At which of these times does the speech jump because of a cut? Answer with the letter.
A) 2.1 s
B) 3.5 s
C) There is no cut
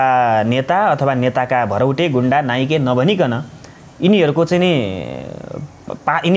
C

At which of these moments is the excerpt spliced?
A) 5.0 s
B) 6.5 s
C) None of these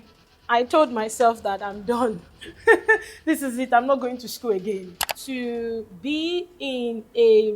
A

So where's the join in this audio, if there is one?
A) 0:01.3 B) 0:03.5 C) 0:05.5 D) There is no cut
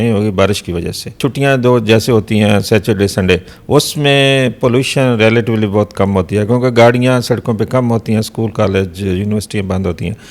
A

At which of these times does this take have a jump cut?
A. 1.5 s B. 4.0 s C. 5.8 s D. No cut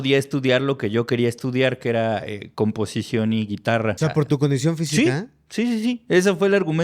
B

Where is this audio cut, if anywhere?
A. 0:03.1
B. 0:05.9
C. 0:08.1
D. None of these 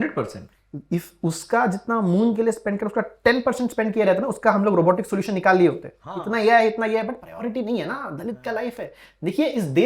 D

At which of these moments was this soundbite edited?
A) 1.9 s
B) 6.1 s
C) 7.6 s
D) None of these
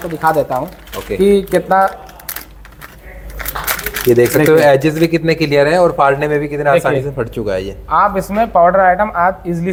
D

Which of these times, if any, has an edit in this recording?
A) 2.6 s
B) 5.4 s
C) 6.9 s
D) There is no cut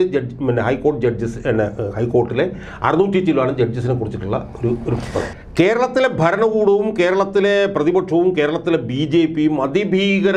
B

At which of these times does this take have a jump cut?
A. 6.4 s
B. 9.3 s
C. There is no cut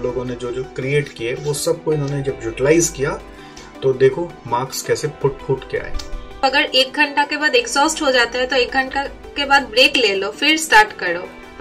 A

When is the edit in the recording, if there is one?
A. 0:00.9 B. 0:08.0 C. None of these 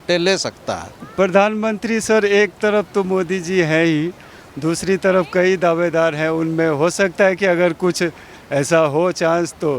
A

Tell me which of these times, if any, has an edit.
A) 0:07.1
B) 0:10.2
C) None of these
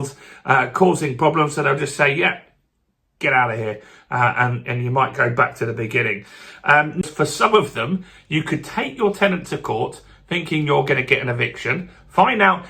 A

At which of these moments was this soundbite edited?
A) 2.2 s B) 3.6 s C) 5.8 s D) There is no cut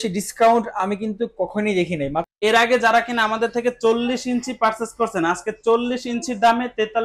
A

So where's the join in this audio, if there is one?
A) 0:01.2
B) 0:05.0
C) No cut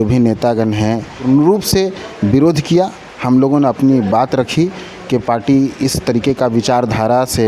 A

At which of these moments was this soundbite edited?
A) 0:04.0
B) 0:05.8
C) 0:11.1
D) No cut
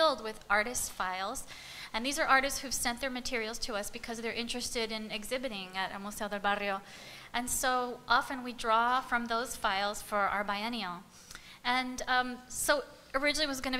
B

